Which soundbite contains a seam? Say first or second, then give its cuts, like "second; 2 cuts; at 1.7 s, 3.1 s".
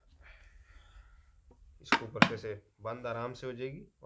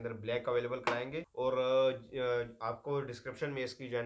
second; 1 cut; at 1.3 s